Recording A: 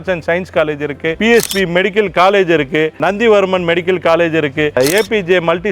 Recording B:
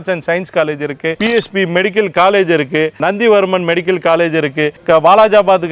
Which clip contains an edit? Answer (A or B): A